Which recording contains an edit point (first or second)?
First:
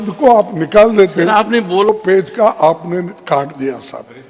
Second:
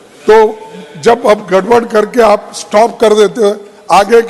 first